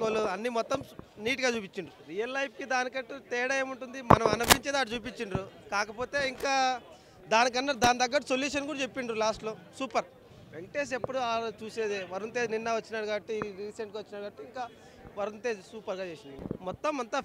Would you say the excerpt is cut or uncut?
uncut